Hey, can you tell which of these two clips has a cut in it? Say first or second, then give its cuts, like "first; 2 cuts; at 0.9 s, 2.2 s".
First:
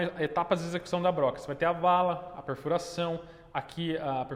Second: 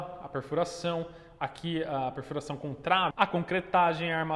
second; 1 cut; at 3.1 s